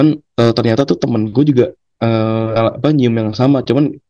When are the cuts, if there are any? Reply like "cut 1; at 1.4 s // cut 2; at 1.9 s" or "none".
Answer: cut 1; at 2.5 s